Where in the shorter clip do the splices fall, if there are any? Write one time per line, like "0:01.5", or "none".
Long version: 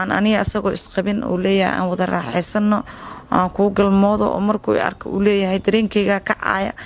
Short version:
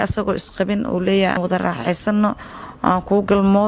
0:01.4